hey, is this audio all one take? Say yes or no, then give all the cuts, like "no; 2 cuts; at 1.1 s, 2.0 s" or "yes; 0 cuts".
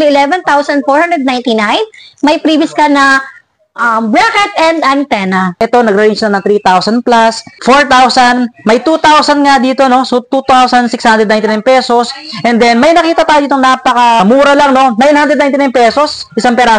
no; 3 cuts; at 5.6 s, 7.5 s, 14.2 s